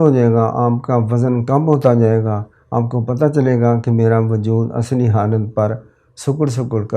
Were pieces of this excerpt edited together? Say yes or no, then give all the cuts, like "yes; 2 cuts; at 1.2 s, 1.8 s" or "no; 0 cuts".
no; 0 cuts